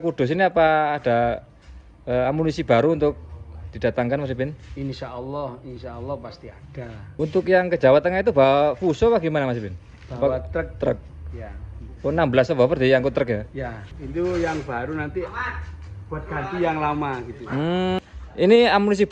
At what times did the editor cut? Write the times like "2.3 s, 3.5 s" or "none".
7.2 s, 13.9 s, 18.0 s

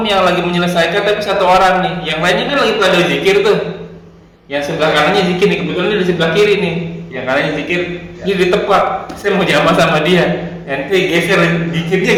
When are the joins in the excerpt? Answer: none

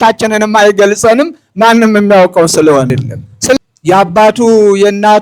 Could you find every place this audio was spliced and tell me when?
3.6 s

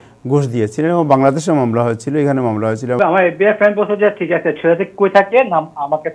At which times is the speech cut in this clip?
3.0 s

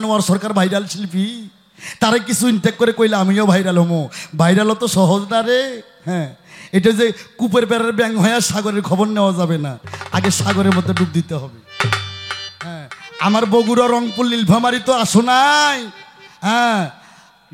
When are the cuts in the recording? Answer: none

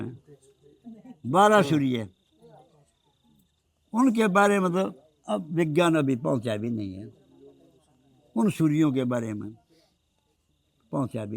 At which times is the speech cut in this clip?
none

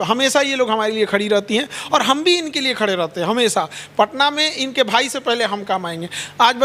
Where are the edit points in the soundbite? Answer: none

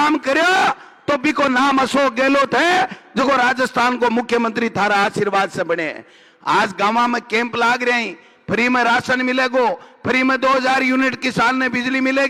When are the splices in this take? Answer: none

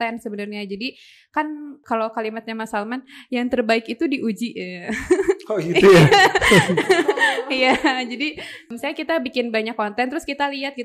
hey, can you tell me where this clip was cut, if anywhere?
1.8 s, 8.7 s

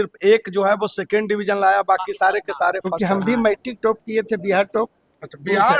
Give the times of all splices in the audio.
2.9 s

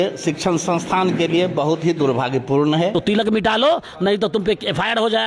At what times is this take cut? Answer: 2.9 s

